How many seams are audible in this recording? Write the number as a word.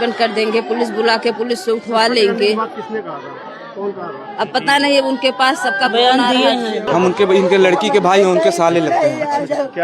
one